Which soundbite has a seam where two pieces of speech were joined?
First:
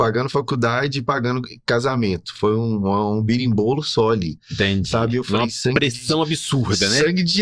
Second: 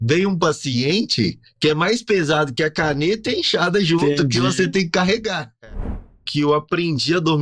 second; 1 cut; at 6.1 s

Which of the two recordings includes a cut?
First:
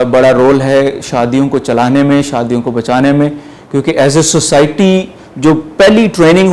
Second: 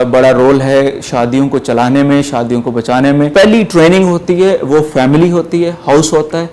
second; 1 cut; at 3.3 s

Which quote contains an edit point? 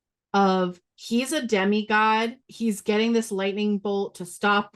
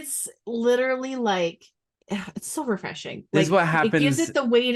first; 1 cut; at 2.4 s

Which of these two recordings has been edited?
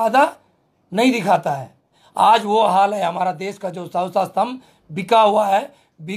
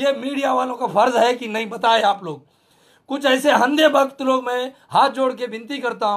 first; 1 cut; at 2.0 s

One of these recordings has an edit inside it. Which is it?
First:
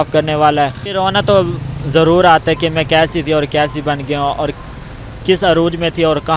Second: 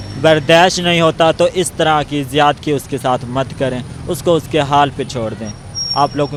first; 1 cut; at 1.0 s

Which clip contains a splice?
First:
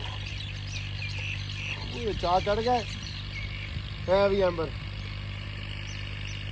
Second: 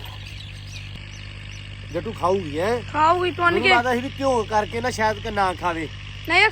second; 1 cut; at 0.9 s

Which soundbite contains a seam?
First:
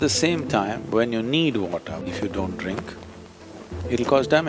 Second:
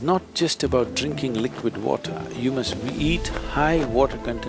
first; 1 cut; at 2.1 s

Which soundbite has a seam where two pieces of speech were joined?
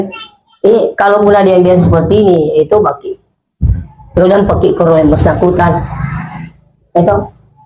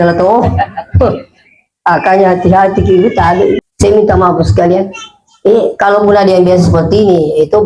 second; 1 cut; at 3.7 s

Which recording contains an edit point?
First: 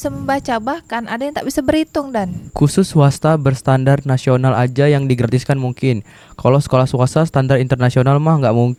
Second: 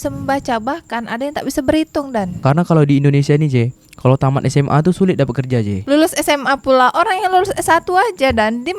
second; 1 cut; at 2.4 s

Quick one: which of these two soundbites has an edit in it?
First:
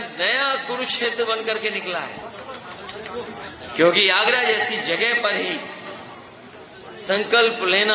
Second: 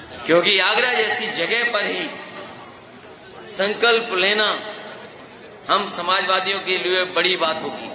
first; 1 cut; at 2.2 s

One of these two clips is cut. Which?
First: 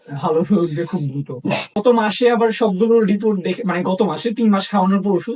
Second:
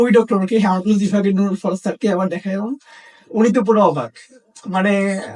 first; 1 cut; at 1.7 s

